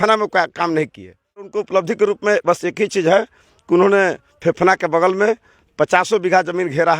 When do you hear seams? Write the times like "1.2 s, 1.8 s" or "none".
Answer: 1.5 s